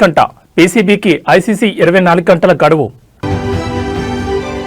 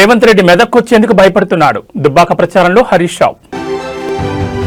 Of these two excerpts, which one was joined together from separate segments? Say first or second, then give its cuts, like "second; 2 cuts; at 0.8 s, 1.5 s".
first; 1 cut; at 3.2 s